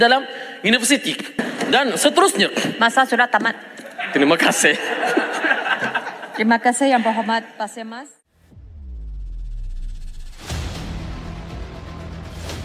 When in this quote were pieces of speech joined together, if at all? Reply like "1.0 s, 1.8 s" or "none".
1.4 s